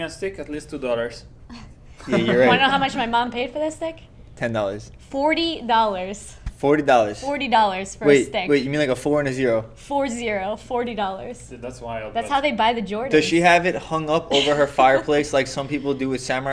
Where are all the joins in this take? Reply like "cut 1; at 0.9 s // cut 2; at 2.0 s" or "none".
none

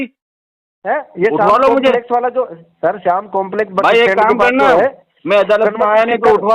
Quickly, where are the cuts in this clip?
none

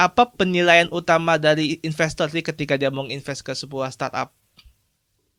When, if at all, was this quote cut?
none

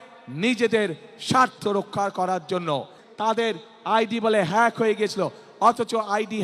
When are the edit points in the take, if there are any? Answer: cut 1; at 3.0 s

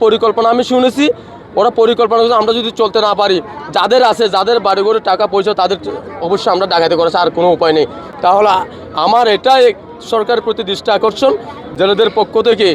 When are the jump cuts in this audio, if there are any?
none

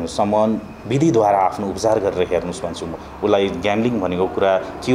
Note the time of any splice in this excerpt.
cut 1; at 3.0 s

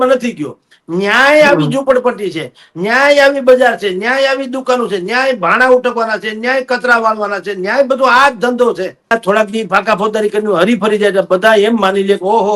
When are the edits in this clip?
cut 1; at 9.1 s

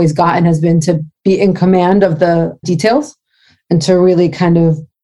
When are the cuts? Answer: cut 1; at 2.6 s

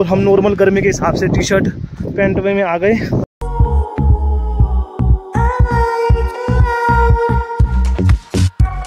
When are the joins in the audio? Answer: none

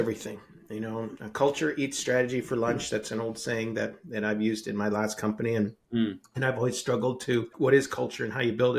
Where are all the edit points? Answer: cut 1; at 7.5 s

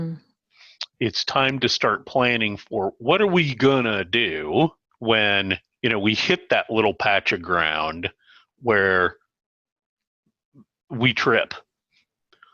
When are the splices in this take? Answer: cut 1; at 4.9 s

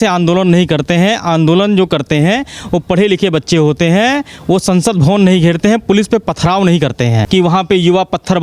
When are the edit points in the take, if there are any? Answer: cut 1; at 7.2 s

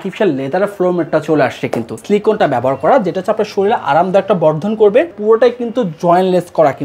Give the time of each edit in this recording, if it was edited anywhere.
cut 1; at 2.0 s // cut 2; at 5.2 s

